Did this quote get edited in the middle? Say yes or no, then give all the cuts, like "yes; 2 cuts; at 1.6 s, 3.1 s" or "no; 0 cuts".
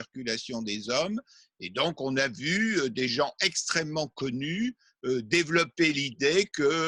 no; 0 cuts